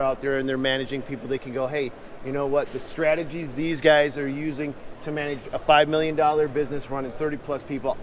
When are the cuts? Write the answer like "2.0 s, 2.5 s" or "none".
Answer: none